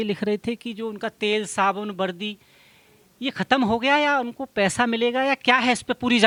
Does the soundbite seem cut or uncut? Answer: uncut